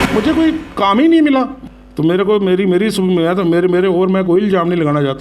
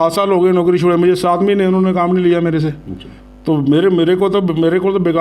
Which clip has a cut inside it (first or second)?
first